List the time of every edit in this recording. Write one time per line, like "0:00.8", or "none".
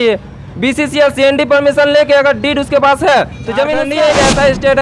0:03.8